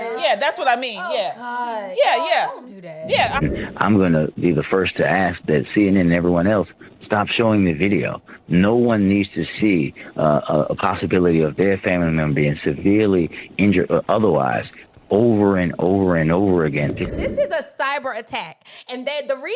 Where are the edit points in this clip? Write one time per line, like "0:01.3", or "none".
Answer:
0:03.4
0:17.1